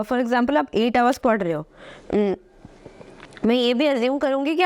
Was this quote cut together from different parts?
no; 0 cuts

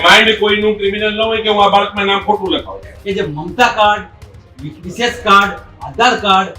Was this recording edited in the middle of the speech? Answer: yes; 1 cut; at 3.0 s

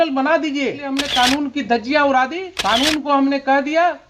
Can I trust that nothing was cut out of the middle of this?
no; 2 cuts; at 1.0 s, 2.5 s

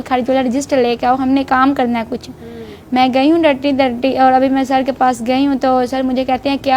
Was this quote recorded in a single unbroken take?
yes; 0 cuts

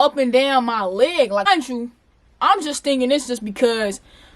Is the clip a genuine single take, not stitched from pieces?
no; 1 cut; at 1.4 s

